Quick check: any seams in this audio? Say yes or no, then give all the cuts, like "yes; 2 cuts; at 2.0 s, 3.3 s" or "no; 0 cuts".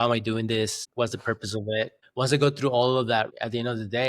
yes; 2 cuts; at 2.0 s, 3.3 s